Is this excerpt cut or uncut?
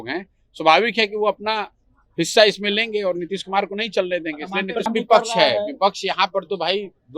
cut